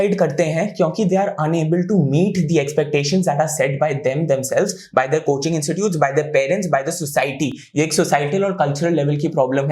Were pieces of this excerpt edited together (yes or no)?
no